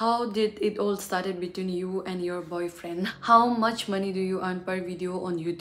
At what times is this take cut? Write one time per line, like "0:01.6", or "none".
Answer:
0:03.2